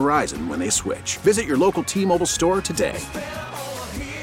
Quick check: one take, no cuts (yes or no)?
yes